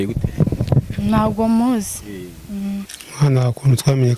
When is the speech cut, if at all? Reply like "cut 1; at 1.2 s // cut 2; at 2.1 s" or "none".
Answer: cut 1; at 3.0 s